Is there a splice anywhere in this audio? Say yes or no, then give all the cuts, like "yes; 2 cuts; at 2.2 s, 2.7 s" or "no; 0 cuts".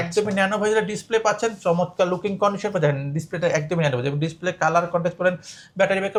no; 0 cuts